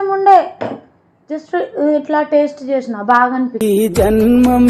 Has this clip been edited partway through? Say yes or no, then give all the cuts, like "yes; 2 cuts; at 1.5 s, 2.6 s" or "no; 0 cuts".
yes; 1 cut; at 3.7 s